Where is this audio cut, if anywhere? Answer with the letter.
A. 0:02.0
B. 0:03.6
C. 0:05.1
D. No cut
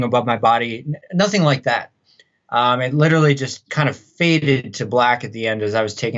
B